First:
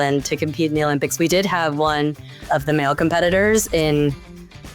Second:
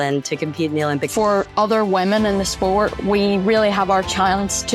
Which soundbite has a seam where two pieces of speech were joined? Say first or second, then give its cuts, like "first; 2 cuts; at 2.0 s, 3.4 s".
second; 1 cut; at 1.1 s